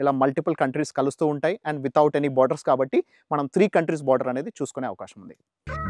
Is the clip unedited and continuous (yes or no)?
yes